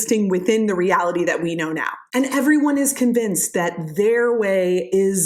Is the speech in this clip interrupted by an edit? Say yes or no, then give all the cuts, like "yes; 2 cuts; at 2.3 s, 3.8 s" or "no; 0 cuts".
no; 0 cuts